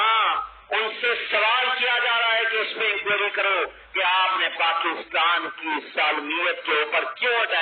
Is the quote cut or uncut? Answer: uncut